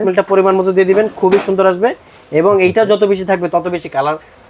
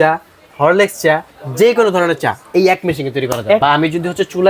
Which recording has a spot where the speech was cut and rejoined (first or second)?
second